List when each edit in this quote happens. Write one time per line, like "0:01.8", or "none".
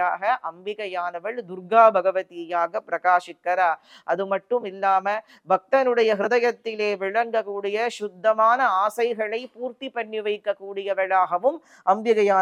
none